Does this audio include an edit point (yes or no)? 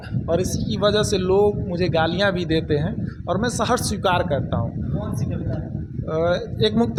no